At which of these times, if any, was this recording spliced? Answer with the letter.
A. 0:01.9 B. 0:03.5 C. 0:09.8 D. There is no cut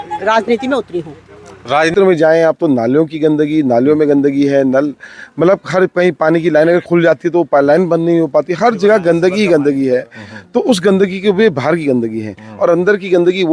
A